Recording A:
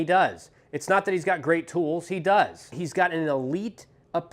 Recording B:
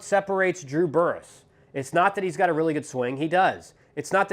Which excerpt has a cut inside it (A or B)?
A